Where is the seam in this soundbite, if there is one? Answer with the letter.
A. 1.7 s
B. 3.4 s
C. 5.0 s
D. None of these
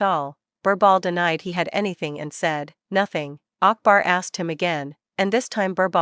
B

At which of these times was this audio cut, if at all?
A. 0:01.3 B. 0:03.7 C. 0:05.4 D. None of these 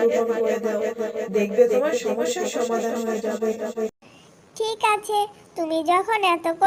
D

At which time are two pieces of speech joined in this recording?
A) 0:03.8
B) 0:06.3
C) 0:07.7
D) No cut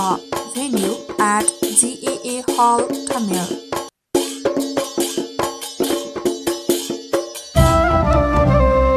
A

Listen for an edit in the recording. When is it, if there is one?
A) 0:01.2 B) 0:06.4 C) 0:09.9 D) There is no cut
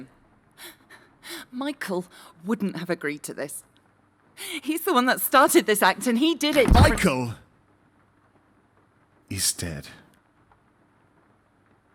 D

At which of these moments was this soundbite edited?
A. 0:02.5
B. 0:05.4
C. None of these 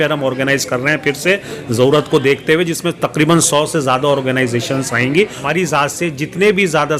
B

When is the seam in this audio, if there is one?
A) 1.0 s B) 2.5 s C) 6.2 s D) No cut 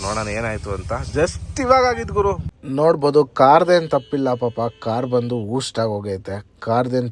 B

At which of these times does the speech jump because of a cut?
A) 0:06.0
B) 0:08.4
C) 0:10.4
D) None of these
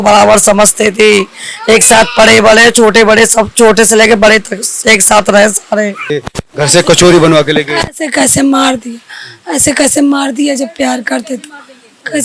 A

